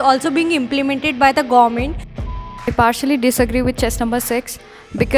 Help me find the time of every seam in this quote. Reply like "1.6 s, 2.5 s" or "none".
2.2 s